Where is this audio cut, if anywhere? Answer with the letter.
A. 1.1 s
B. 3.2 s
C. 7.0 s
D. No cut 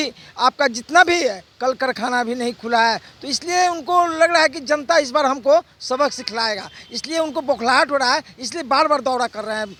D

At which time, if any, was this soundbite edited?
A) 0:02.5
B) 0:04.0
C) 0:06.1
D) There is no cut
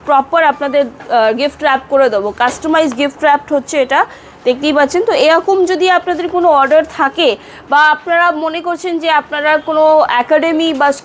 D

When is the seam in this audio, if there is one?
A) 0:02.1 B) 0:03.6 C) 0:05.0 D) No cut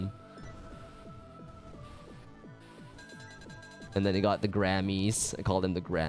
A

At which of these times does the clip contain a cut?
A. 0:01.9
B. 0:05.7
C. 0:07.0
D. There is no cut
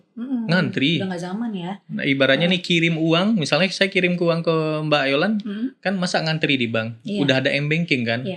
D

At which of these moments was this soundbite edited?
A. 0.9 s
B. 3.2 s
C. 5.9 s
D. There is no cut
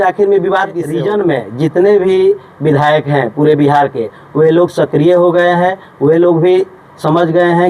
A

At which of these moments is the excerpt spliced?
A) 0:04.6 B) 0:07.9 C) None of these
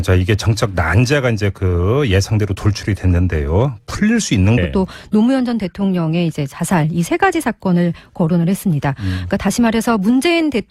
C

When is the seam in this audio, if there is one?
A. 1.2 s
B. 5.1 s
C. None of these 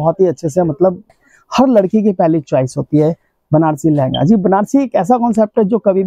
A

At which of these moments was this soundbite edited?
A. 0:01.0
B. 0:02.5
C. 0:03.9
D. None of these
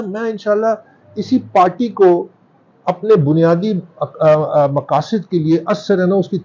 D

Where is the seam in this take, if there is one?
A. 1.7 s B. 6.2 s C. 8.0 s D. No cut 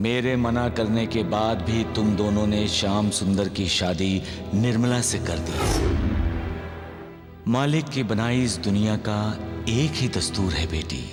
D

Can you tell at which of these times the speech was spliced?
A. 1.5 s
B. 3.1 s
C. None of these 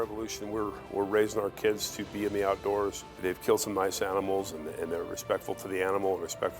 B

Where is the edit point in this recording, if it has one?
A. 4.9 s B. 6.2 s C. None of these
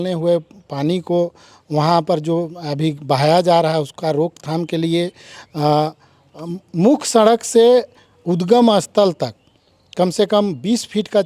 C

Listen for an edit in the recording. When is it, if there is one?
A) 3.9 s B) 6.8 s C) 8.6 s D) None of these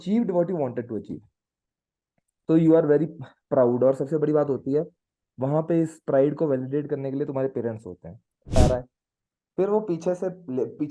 C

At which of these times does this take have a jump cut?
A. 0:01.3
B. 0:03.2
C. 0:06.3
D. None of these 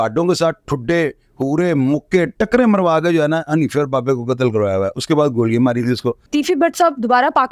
C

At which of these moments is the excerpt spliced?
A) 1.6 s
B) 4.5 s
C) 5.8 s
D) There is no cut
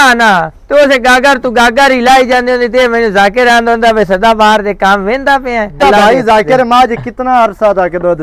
C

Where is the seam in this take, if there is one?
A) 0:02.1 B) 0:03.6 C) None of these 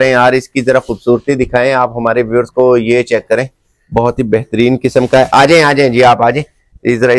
C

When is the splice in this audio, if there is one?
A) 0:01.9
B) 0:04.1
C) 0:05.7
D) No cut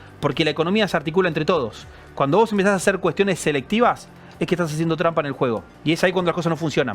C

